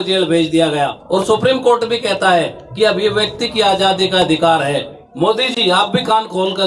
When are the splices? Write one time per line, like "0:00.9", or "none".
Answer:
0:01.0
0:05.0